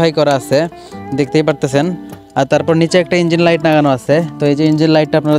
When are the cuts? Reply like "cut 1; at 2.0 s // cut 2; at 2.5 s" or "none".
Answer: none